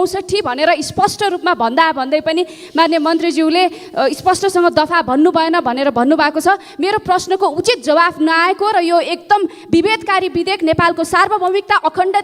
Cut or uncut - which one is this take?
uncut